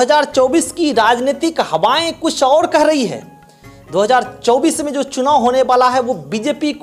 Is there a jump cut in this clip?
no; 0 cuts

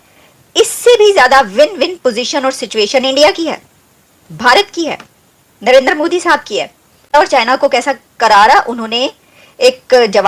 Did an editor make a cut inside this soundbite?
yes; 1 cut; at 7.1 s

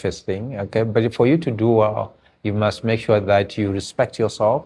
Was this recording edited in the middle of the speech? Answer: no; 0 cuts

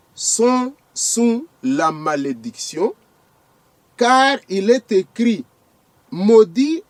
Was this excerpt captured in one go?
yes; 0 cuts

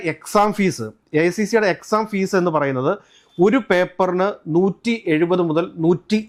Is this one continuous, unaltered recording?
yes; 0 cuts

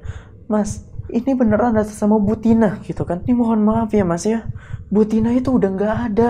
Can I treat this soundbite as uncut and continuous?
no; 1 cut; at 3.2 s

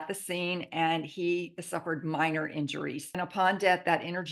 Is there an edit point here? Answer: yes; 1 cut; at 3.1 s

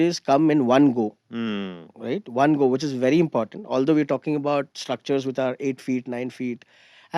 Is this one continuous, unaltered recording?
yes; 0 cuts

